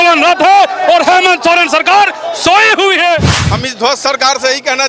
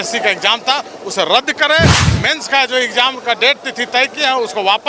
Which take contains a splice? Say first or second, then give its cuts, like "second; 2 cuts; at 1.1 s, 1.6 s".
first; 1 cut; at 3.4 s